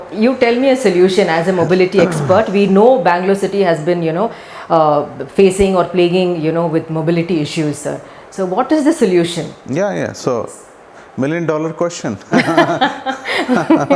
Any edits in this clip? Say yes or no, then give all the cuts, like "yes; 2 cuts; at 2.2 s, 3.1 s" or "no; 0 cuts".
no; 0 cuts